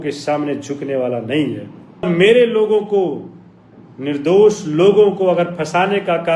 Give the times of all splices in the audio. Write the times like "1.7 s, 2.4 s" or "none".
2.1 s